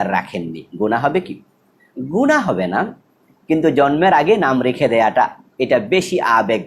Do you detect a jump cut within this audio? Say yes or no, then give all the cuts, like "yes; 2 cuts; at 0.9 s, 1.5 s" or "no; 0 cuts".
no; 0 cuts